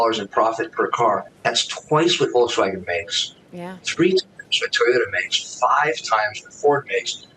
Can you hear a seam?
yes; 1 cut; at 1.3 s

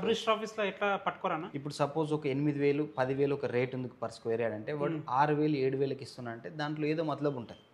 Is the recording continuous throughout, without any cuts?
no; 1 cut; at 1.6 s

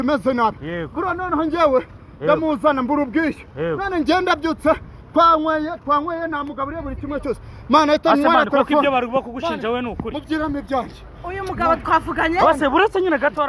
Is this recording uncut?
yes; 0 cuts

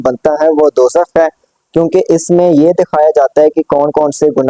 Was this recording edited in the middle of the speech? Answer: no; 0 cuts

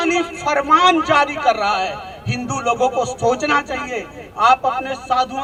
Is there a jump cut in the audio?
no; 0 cuts

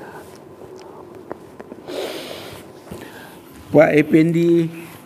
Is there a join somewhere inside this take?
no; 0 cuts

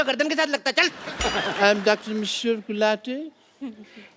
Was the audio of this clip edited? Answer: yes; 1 cut; at 1.1 s

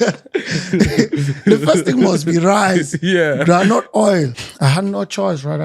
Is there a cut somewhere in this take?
yes; 1 cut; at 4.3 s

